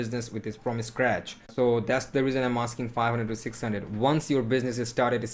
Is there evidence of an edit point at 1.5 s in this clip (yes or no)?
yes